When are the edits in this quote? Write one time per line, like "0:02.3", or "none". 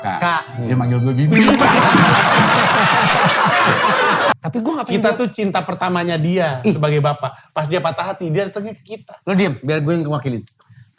0:04.3